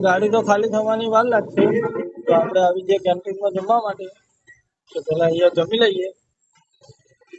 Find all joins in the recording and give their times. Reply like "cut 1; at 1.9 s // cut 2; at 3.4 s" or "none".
none